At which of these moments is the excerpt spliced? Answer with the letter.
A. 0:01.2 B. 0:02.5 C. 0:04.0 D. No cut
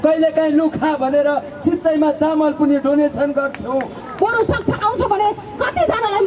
C